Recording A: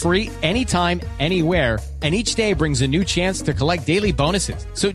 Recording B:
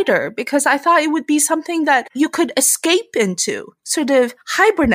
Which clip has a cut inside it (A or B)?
B